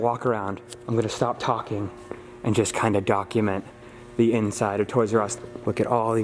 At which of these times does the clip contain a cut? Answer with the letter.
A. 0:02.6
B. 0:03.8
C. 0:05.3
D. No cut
C